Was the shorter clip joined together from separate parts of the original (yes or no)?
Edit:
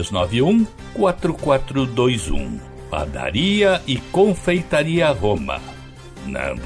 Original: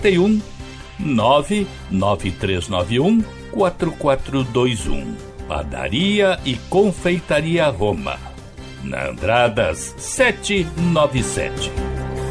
no